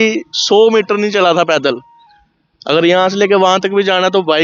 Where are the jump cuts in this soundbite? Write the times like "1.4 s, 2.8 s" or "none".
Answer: none